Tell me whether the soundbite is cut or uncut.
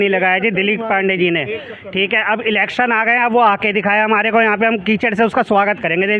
uncut